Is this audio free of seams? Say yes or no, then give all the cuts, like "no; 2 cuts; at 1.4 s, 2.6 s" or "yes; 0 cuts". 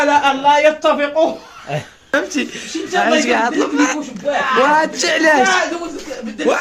no; 1 cut; at 2.1 s